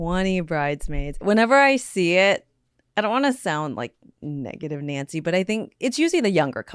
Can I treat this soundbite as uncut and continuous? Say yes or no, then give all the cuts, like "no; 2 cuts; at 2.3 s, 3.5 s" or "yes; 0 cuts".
no; 1 cut; at 1.2 s